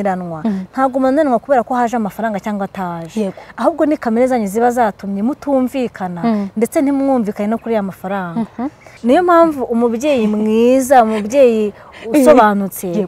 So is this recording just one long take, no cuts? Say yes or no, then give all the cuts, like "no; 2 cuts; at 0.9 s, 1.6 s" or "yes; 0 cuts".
no; 1 cut; at 8.9 s